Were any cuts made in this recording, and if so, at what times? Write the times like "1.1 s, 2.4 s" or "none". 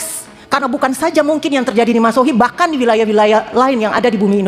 none